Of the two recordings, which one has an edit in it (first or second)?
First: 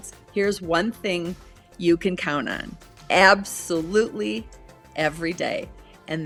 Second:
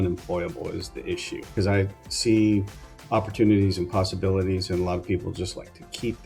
second